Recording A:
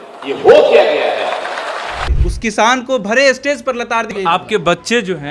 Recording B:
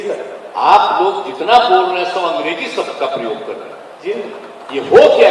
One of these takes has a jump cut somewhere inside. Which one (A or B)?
A